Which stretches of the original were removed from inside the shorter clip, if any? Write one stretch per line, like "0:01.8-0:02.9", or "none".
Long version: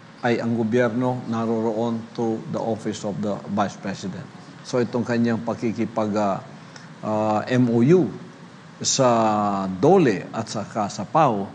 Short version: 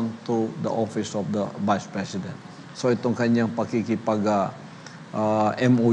none